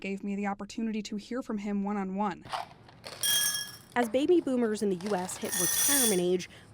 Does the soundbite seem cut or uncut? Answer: cut